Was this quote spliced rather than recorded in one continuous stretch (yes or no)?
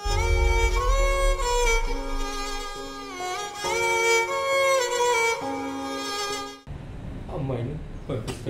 yes